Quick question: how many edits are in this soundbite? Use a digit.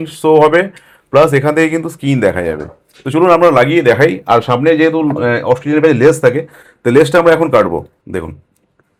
0